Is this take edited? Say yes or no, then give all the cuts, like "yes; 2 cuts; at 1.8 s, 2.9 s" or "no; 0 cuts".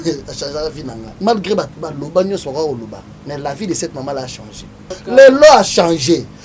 yes; 2 cuts; at 1.0 s, 4.9 s